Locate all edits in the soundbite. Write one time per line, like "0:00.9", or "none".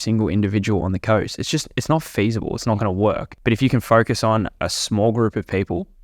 0:03.3